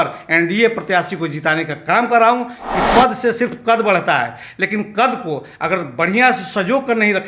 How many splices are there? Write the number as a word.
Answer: one